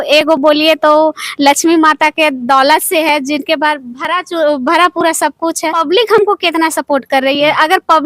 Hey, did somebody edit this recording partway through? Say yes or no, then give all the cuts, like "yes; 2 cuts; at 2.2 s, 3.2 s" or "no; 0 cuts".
yes; 1 cut; at 5.8 s